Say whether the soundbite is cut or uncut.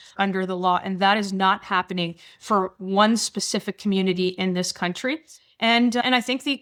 uncut